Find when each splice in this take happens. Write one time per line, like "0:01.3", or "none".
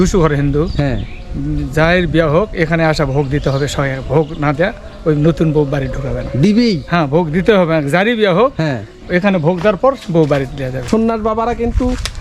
0:10.9